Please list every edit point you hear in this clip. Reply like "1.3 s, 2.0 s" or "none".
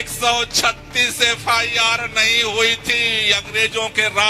none